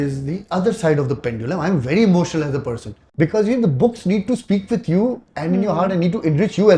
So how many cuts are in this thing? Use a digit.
1